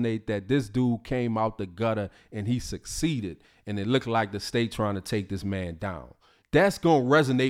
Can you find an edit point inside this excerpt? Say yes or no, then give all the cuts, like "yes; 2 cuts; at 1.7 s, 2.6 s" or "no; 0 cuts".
no; 0 cuts